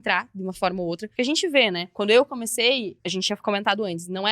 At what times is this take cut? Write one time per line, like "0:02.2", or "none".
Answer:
0:01.4
0:03.0